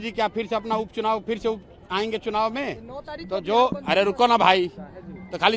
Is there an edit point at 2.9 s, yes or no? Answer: no